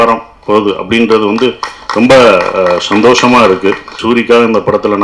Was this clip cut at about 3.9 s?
yes; 1 cut; at 3.9 s

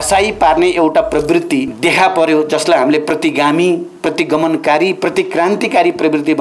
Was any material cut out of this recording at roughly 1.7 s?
yes; 1 cut; at 1.7 s

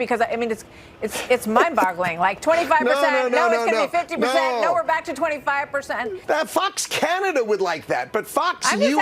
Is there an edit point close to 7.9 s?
no; 1 cut; at 6.2 s

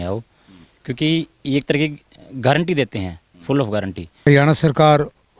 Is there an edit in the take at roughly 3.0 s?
no; 1 cut; at 4.3 s

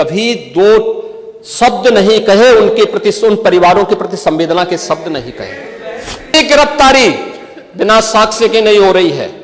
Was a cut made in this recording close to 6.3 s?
yes; 1 cut; at 6.3 s

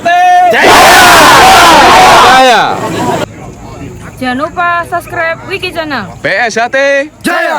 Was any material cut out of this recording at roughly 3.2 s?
yes; 1 cut; at 3.2 s

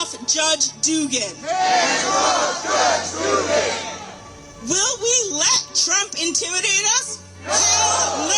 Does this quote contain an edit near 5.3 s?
no; 0 cuts

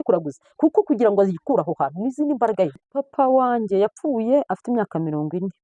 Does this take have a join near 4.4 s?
no; 1 cut; at 2.7 s

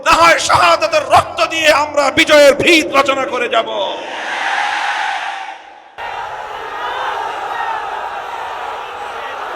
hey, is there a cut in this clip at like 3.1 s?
no; 1 cut; at 6.0 s

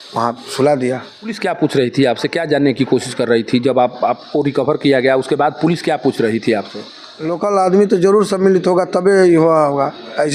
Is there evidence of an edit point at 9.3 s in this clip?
no; 2 cuts; at 1.3 s, 7.3 s

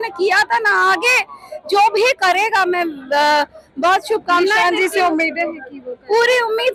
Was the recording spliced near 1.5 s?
no; 0 cuts

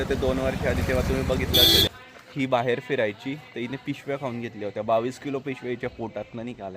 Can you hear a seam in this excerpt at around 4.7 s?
no; 1 cut; at 1.9 s

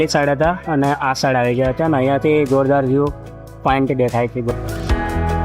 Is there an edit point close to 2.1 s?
no; 1 cut; at 4.5 s

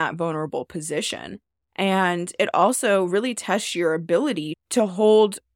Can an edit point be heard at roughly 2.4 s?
no; 1 cut; at 4.6 s

